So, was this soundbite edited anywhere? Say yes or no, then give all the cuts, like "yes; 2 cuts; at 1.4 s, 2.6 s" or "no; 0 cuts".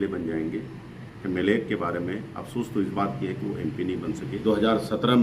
yes; 1 cut; at 4.3 s